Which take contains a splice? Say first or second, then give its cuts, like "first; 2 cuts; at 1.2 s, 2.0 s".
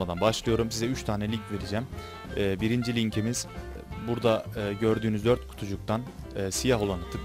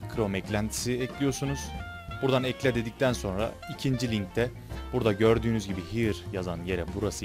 second; 1 cut; at 4.4 s